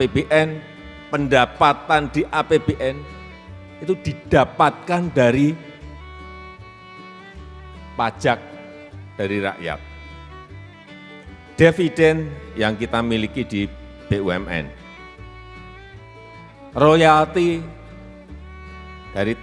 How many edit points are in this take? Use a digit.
2